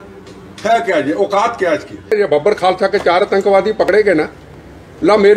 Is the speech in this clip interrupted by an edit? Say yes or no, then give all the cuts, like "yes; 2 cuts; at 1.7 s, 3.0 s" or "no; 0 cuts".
yes; 1 cut; at 2.1 s